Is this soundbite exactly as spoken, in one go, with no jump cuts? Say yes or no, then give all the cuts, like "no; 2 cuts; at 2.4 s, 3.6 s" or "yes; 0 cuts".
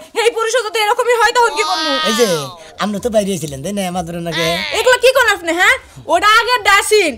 no; 1 cut; at 2.0 s